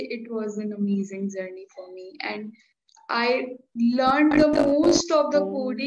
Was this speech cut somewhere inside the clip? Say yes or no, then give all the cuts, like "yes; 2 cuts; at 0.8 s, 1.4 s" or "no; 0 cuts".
no; 0 cuts